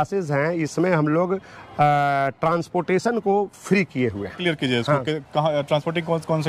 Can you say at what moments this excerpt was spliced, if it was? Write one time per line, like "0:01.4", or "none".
none